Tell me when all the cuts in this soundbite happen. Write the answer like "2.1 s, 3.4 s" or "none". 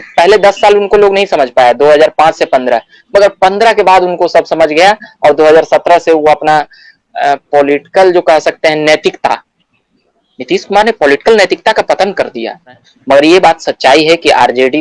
12.9 s